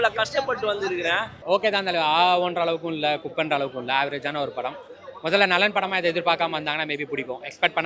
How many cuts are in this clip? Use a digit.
1